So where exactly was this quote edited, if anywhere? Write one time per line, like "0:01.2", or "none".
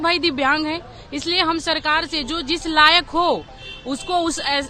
none